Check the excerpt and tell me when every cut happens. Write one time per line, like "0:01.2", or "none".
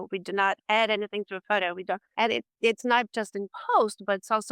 0:02.1